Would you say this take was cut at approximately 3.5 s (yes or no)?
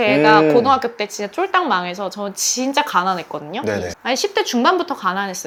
no